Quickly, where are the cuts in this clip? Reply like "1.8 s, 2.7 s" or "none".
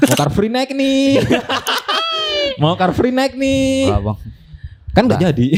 none